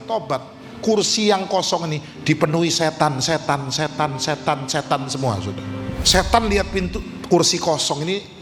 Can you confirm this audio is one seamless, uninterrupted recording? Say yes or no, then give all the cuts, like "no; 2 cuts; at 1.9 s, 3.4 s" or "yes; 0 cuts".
no; 1 cut; at 6.0 s